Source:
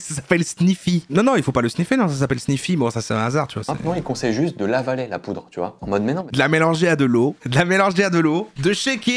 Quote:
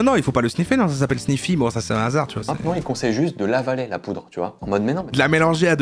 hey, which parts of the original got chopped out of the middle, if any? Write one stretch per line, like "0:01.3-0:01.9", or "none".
none